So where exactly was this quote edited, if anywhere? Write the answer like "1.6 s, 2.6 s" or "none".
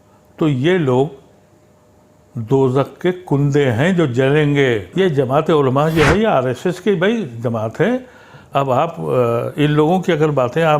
4.9 s